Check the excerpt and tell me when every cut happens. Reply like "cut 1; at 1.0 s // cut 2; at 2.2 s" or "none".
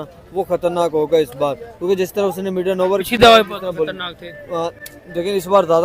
cut 1; at 3.5 s